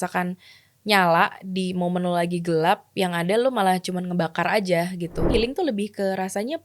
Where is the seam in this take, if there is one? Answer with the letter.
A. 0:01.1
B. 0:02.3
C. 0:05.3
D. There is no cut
C